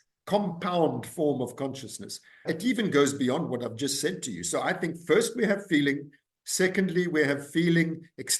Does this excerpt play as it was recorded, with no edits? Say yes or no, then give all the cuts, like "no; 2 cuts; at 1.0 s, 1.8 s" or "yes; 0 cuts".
no; 1 cut; at 2.4 s